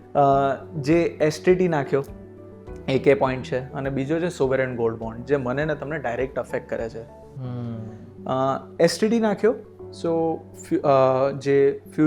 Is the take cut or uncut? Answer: uncut